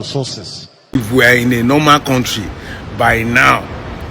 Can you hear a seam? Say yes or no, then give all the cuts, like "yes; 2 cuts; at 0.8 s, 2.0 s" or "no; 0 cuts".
yes; 1 cut; at 1.0 s